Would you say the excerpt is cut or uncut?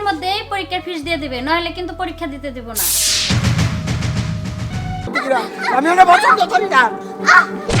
cut